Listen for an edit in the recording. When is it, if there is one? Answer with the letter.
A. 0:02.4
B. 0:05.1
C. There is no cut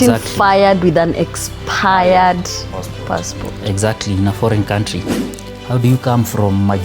B